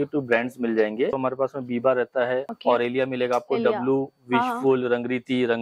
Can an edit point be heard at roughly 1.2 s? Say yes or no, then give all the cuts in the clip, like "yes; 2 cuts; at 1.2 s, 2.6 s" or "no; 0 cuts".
yes; 2 cuts; at 1.2 s, 2.5 s